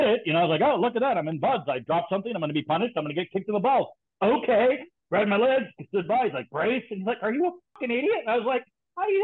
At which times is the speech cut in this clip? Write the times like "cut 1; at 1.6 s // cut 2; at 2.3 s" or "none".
cut 1; at 7.7 s